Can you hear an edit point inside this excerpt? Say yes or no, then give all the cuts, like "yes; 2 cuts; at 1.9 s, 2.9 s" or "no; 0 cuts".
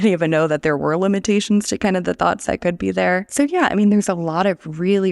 yes; 1 cut; at 3.3 s